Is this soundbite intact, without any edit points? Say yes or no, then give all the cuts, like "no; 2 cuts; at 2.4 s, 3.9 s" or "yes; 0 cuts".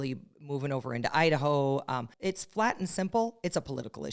no; 1 cut; at 2.1 s